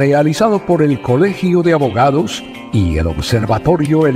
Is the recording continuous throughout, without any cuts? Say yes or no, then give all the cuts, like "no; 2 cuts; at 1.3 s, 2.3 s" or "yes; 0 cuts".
yes; 0 cuts